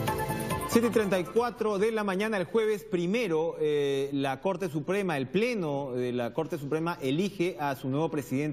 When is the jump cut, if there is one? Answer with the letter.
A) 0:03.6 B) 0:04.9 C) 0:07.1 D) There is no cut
D